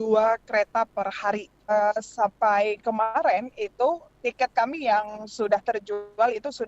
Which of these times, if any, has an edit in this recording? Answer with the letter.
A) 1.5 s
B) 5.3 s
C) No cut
A